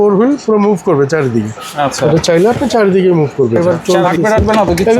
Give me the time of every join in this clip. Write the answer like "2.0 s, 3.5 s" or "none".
3.6 s